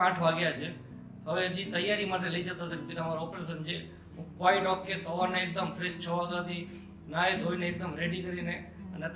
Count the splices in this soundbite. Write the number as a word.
zero